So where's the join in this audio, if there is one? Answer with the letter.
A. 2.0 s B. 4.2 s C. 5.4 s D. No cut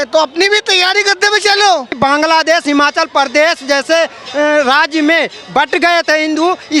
A